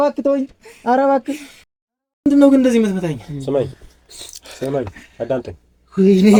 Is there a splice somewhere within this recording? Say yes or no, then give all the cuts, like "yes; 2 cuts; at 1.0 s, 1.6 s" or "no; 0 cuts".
no; 0 cuts